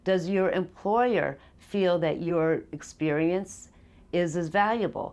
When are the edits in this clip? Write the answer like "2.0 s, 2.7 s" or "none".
2.3 s